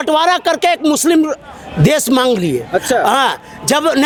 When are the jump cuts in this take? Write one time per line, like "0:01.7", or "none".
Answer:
none